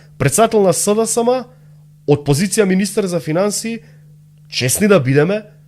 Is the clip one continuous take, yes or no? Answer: yes